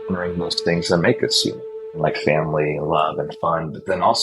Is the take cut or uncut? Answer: cut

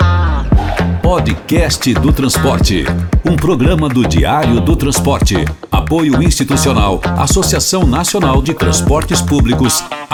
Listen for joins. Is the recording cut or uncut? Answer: uncut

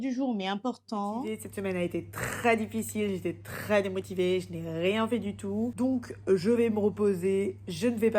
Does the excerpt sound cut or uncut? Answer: cut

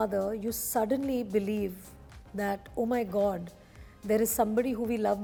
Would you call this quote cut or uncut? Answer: uncut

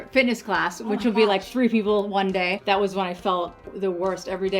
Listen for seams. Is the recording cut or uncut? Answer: cut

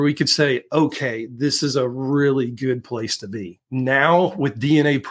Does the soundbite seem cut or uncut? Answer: cut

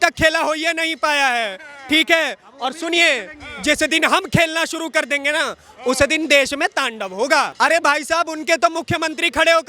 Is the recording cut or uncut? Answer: cut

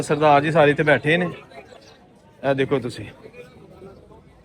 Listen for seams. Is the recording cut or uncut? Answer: uncut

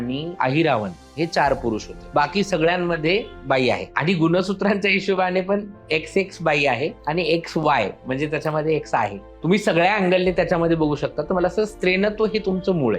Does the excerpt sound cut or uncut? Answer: uncut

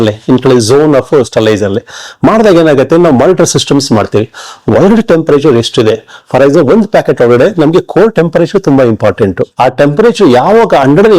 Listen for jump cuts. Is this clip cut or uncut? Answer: cut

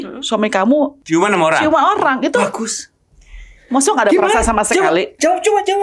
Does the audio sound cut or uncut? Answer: cut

